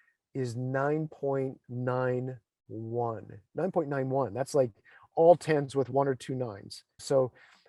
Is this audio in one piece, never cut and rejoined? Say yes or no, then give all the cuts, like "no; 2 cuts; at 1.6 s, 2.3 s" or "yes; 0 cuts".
yes; 0 cuts